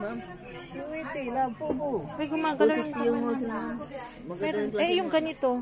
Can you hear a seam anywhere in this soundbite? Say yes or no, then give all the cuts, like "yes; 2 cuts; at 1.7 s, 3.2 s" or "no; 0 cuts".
no; 0 cuts